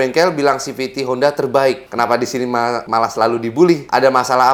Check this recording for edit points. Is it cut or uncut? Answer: uncut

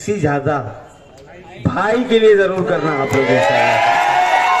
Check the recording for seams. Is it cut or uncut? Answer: uncut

